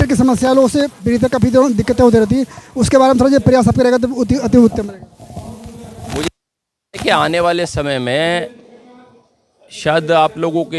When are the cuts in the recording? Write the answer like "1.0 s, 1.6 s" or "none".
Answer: none